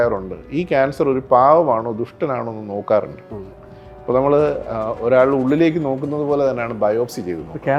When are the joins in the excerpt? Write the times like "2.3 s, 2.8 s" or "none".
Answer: none